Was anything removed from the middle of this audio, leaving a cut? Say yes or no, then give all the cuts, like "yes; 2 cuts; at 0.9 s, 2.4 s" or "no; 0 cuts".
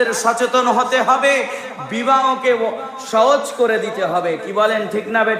no; 0 cuts